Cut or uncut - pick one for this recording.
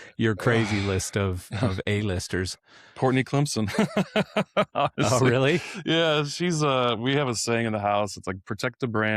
uncut